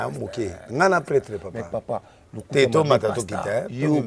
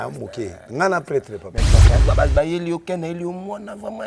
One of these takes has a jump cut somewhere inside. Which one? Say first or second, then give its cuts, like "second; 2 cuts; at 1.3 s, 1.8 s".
second; 1 cut; at 1.9 s